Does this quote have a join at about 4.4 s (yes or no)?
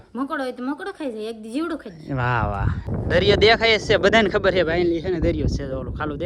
no